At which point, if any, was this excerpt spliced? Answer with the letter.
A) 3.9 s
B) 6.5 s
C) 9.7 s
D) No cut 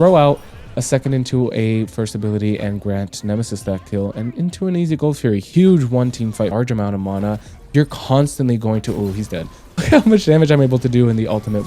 B